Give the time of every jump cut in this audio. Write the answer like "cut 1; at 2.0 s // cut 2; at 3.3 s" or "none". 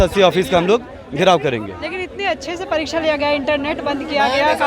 none